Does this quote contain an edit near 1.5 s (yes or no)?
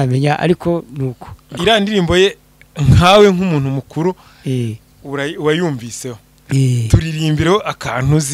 yes